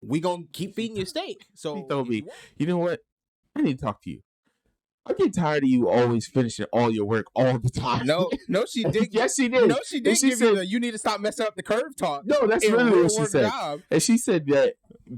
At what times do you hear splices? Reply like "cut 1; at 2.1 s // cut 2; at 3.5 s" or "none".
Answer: cut 1; at 1.6 s